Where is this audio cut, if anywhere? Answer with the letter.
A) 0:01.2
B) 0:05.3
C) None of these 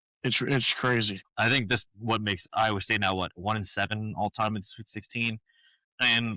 A